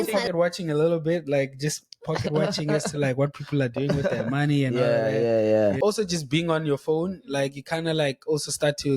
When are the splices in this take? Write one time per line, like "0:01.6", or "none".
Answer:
0:05.8